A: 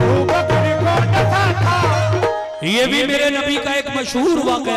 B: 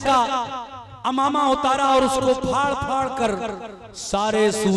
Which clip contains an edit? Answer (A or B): A